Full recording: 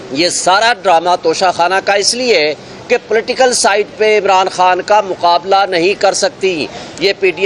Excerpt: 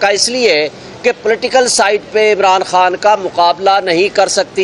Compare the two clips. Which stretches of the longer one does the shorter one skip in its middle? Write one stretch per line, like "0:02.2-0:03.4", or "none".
none